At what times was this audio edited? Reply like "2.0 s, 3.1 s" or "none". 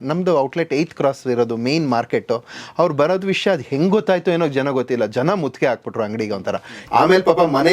6.8 s